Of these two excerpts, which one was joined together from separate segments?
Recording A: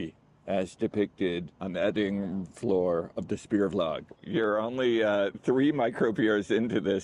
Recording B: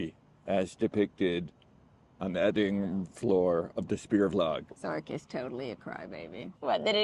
A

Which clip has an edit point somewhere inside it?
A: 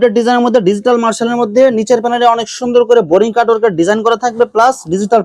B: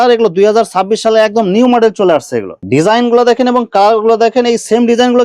B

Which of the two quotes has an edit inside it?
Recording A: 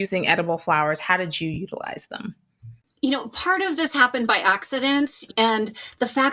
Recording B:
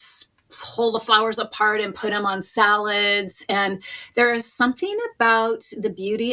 A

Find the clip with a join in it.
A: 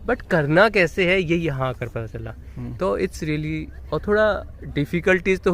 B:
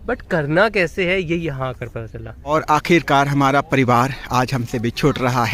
B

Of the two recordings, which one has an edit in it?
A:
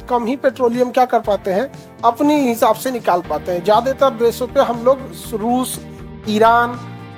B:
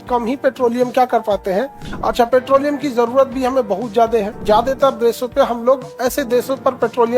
B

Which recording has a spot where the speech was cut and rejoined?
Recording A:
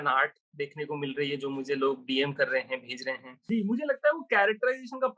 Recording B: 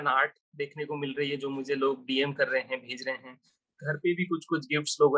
A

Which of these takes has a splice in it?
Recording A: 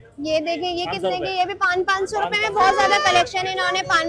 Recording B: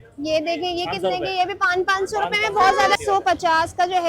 B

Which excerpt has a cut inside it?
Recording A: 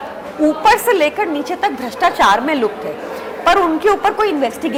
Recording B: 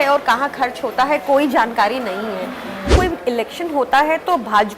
B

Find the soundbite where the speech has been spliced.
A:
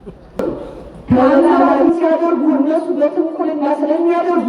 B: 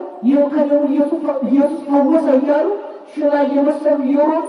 A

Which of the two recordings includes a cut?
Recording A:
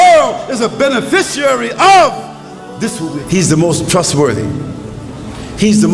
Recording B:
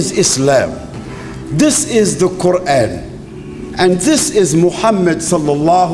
A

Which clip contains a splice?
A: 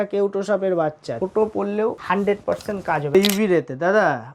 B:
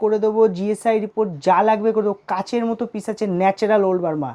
A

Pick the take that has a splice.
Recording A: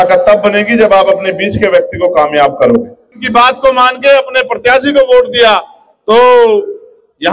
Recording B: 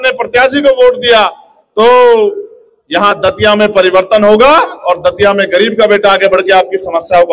A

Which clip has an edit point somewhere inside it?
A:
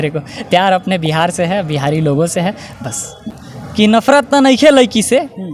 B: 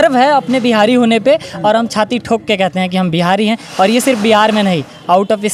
A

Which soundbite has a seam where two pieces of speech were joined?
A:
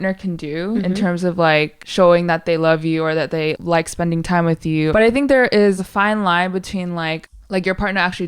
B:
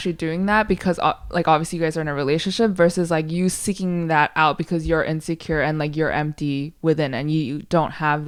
A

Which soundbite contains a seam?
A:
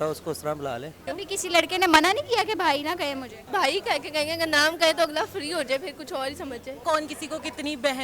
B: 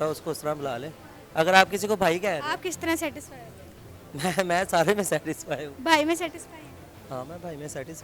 A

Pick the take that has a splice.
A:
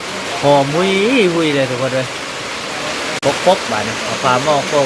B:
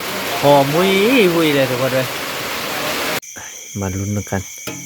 B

